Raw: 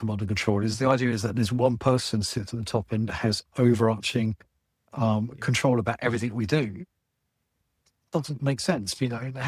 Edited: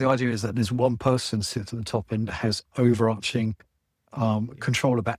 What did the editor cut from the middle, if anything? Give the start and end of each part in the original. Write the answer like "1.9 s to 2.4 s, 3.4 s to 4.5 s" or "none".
none

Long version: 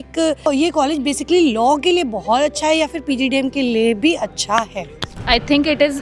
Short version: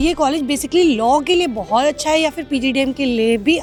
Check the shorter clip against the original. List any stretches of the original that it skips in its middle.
none

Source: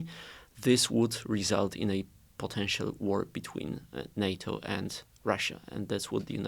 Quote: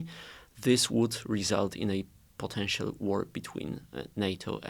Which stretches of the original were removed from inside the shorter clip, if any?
none

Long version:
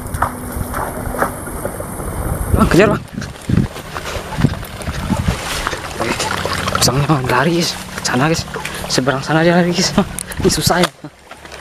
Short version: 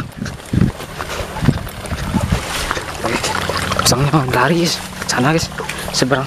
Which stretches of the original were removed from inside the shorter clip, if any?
none

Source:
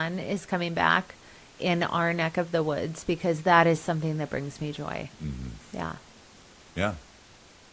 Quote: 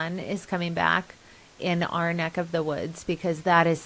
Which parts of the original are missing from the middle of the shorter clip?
none

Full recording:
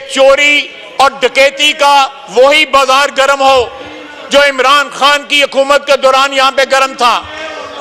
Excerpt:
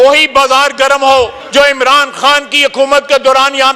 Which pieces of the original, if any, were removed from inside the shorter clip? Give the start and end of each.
3.8 s to 4.2 s

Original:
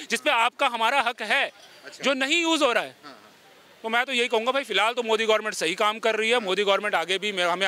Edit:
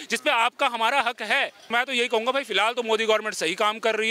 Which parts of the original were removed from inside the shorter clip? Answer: 1.6 s to 3.8 s

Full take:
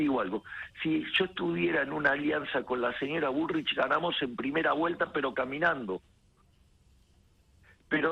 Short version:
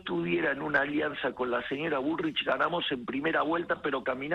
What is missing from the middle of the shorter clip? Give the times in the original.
none

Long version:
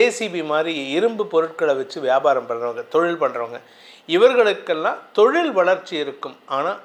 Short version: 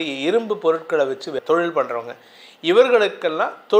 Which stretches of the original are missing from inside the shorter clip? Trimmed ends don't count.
2.0 s to 2.8 s

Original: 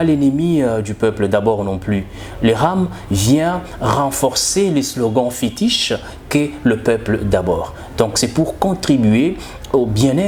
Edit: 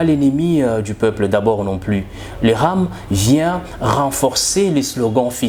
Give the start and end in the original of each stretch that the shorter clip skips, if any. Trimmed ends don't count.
none

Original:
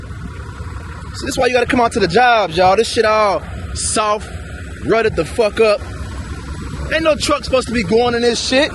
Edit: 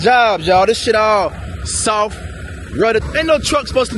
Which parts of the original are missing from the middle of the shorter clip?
5.1 s to 6.8 s

